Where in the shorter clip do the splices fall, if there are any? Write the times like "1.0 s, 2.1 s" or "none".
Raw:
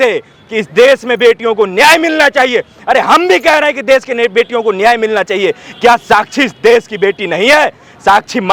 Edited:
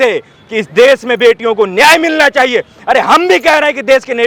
none